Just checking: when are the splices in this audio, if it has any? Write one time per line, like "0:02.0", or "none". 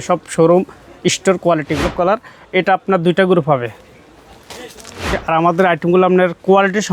0:01.9
0:05.2